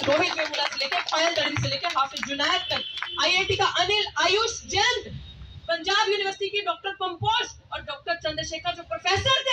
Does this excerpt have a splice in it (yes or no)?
no